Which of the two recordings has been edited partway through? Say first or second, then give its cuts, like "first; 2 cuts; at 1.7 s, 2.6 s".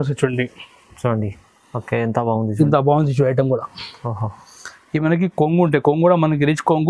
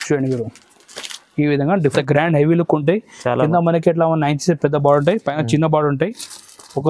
second; 1 cut; at 1.9 s